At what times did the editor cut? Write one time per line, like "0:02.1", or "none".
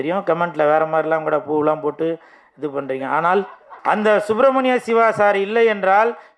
0:03.6